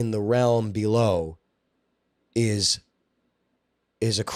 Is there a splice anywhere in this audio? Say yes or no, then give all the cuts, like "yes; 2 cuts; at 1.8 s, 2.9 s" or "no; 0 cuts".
no; 0 cuts